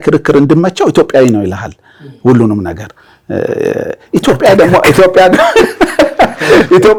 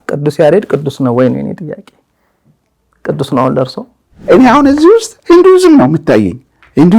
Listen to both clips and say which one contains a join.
second; 1 cut; at 4.1 s

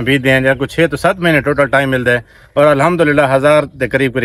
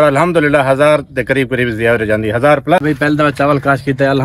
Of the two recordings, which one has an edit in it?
second; 1 cut; at 2.8 s

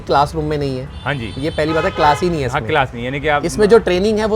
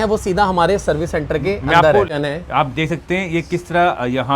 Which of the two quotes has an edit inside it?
second; 1 cut; at 2.1 s

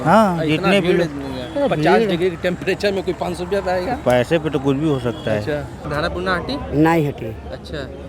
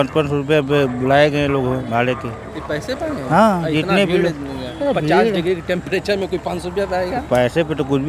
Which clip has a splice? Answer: first; 1 cut; at 5.9 s

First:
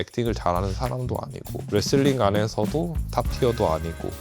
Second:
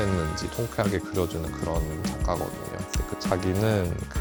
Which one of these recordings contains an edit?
first; 1 cut; at 3.0 s

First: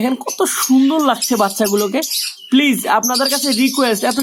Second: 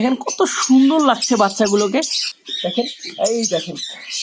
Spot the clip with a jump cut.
second; 1 cut; at 2.3 s

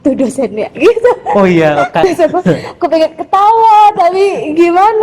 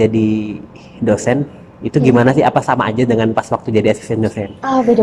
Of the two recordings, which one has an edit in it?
first; 1 cut; at 2.0 s

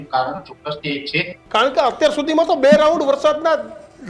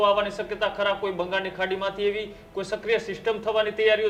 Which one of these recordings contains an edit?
first; 1 cut; at 1.3 s

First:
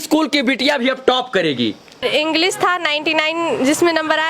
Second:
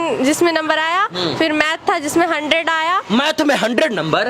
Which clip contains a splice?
first; 1 cut; at 2.0 s

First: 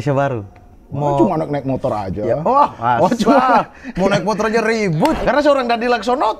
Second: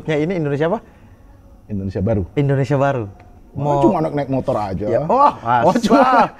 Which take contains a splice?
first; 1 cut; at 5.2 s

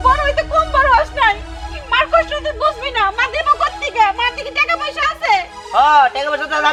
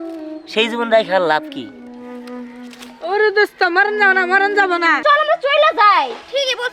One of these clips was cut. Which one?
second; 1 cut; at 5.0 s

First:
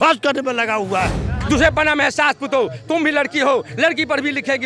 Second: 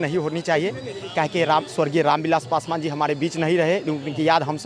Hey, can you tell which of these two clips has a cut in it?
first; 1 cut; at 1.3 s

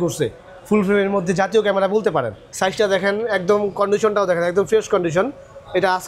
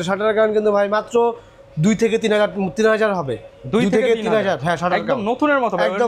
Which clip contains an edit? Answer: first; 1 cut; at 2.4 s

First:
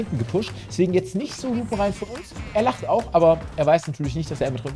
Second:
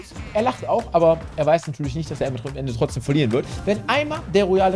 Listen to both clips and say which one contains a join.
second; 1 cut; at 3.5 s

